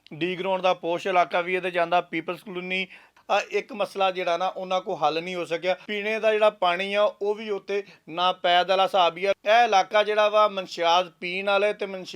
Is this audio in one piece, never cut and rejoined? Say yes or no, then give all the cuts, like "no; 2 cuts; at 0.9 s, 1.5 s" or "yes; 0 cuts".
no; 3 cuts; at 3.2 s, 5.9 s, 9.4 s